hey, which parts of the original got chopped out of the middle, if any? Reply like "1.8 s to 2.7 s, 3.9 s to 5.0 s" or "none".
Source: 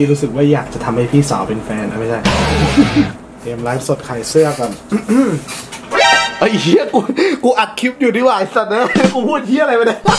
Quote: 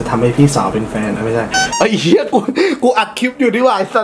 2.3 s to 6.1 s